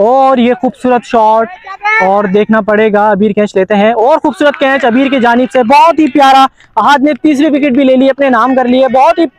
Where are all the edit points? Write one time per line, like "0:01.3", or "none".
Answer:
none